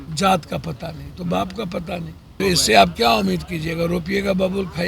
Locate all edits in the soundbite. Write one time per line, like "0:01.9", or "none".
0:02.4